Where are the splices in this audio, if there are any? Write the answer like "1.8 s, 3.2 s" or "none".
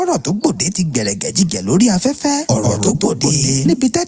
none